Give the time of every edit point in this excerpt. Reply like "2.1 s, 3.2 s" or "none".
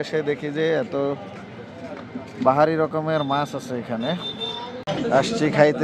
4.8 s